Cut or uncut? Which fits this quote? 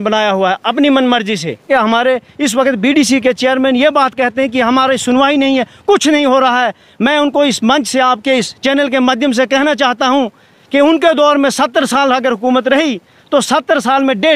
cut